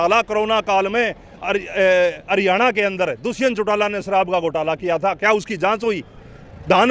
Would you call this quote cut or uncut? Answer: uncut